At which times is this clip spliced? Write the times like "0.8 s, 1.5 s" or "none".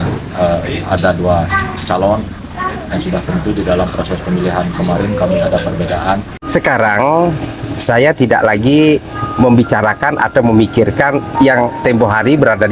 6.4 s